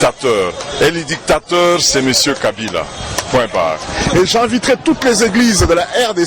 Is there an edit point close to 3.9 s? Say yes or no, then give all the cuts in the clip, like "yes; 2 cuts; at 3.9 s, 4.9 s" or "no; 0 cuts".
yes; 1 cut; at 3.9 s